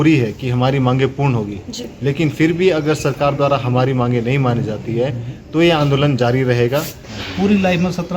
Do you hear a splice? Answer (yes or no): yes